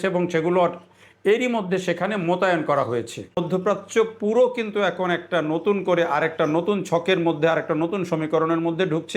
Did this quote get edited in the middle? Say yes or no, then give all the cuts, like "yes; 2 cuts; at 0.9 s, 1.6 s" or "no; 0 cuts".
yes; 1 cut; at 3.4 s